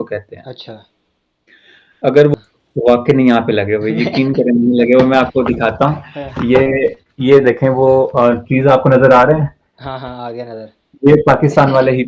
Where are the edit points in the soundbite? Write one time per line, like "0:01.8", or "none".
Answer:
0:02.3